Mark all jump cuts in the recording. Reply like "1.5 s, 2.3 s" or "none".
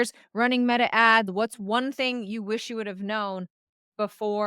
1.3 s